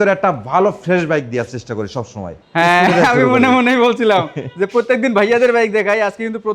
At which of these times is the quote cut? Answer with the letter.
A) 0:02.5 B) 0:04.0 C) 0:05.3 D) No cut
A